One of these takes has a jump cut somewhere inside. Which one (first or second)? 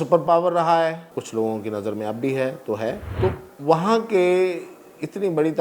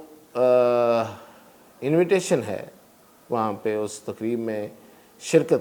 first